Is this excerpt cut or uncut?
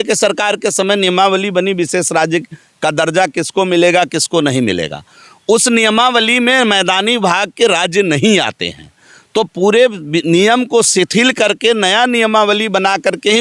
uncut